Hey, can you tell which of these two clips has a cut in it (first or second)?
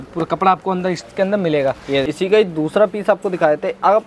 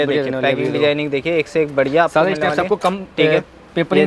first